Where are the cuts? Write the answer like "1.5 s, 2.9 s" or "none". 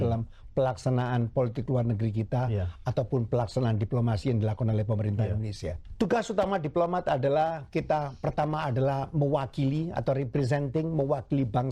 5.8 s